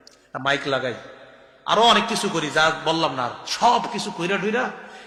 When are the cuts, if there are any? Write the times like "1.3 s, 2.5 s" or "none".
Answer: none